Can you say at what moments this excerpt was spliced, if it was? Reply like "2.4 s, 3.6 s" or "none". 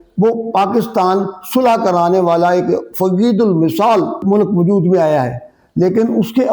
4.2 s

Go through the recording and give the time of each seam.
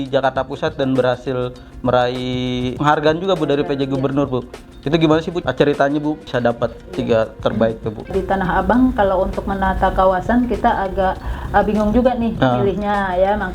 2.7 s, 5.4 s, 6.2 s, 8.1 s

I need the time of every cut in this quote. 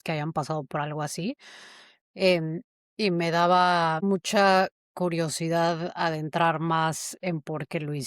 4.0 s

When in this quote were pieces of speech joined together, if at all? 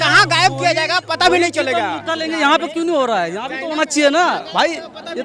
none

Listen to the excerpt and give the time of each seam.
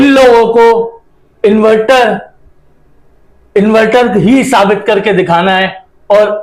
none

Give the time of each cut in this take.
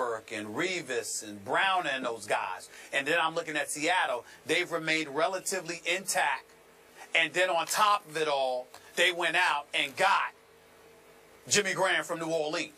6.8 s

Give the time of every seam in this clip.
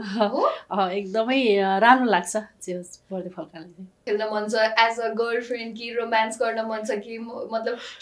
4.0 s

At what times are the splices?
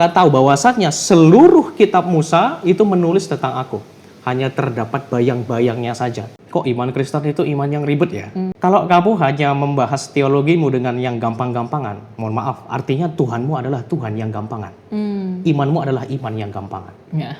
6.3 s, 8.5 s

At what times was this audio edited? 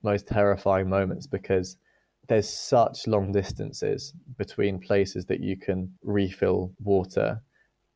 5.9 s, 6.7 s

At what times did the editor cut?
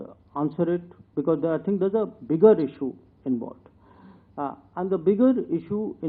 none

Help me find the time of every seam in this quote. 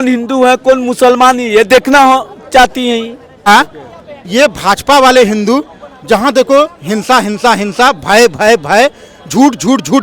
3.5 s

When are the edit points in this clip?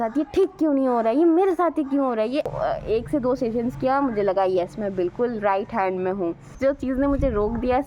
2.5 s, 6.5 s

